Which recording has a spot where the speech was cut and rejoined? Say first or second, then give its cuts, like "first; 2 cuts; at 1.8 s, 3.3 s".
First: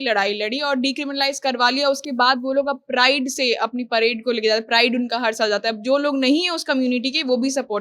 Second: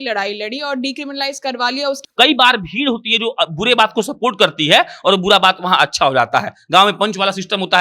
second; 1 cut; at 2.0 s